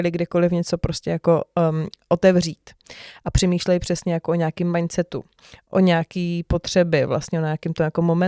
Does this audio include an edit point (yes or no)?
no